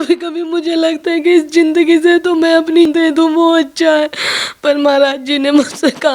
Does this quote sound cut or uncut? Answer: cut